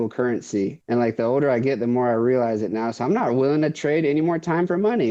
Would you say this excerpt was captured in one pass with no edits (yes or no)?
yes